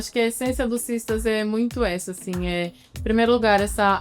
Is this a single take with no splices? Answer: yes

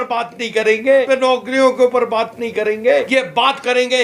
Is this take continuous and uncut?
no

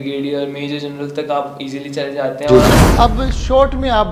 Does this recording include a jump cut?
yes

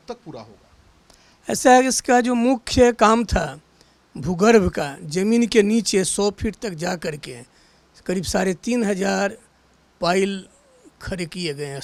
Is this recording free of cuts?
yes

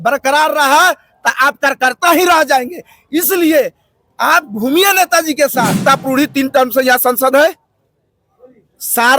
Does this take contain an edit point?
yes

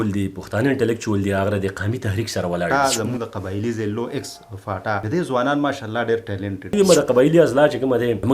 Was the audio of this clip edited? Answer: yes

